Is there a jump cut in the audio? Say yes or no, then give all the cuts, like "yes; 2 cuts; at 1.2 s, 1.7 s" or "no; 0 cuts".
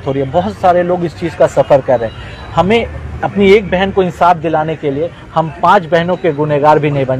no; 0 cuts